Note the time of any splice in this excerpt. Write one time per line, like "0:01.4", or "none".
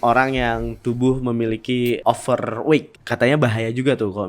0:02.0
0:02.9